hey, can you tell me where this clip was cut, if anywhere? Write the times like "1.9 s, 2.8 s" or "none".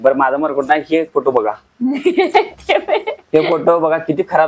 none